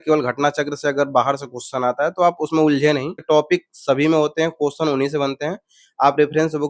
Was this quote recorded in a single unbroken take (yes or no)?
no